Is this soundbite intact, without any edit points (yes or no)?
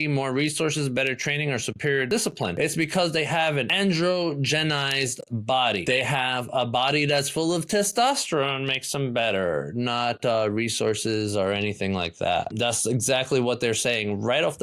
no